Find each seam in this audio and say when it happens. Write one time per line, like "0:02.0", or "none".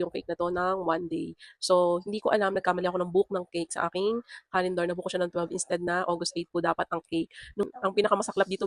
0:07.6

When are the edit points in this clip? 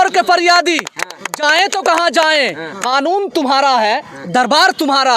none

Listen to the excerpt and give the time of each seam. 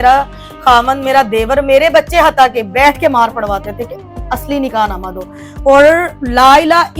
none

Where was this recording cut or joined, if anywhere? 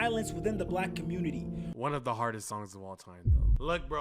0:01.7

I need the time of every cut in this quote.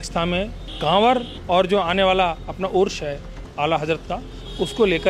none

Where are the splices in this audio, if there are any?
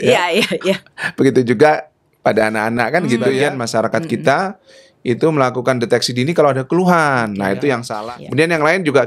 0:03.4
0:07.9

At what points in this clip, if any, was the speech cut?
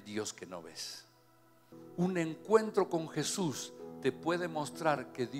0:01.8

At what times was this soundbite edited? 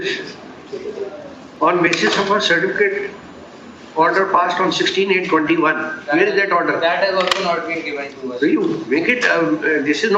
none

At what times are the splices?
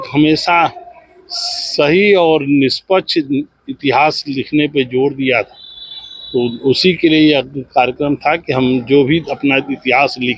none

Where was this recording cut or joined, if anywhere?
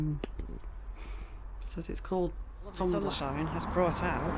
0:03.1

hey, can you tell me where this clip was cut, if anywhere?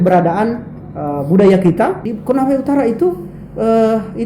0:02.0

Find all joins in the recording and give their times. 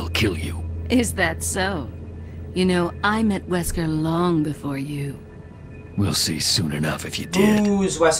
0:07.2

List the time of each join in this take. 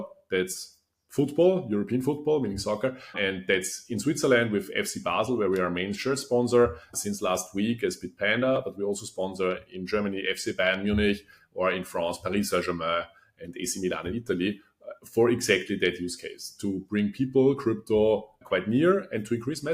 0:03.2
0:06.9
0:18.4

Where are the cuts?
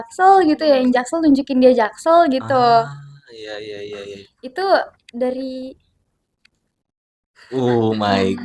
none

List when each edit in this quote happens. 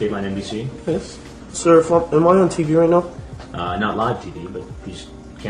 none

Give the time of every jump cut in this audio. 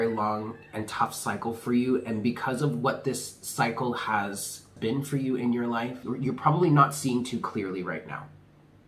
0:04.7
0:06.1

